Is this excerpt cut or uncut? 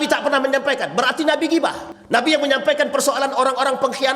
cut